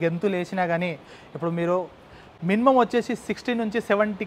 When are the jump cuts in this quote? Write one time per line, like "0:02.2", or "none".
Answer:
none